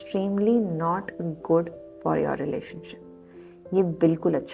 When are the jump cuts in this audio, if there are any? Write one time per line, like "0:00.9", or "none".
none

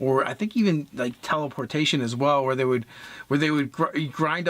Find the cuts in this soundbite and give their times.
0:03.2

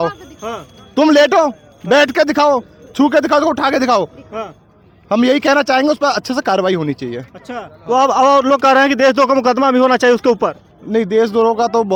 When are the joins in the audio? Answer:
none

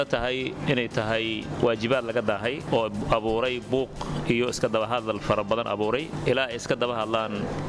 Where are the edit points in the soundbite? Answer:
none

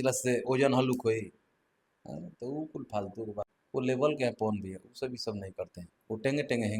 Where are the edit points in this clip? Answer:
0:03.6

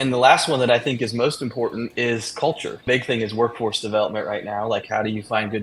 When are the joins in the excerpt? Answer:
0:01.9
0:02.8

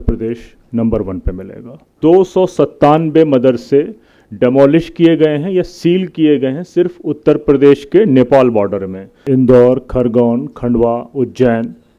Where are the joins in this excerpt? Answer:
0:01.9
0:09.2

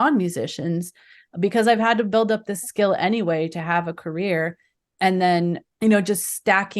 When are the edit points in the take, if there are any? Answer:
0:05.7

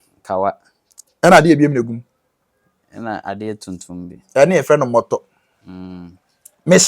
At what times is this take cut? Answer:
none

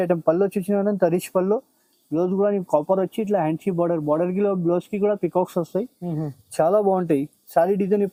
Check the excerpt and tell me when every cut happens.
none

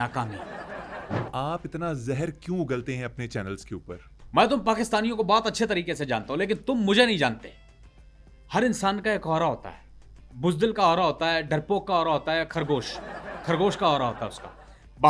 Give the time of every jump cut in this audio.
0:01.2
0:04.1

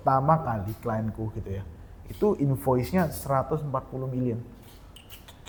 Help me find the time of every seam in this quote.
none

